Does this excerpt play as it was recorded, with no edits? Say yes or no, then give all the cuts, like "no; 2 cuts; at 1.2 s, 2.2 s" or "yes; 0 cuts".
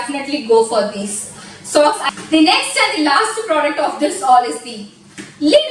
yes; 0 cuts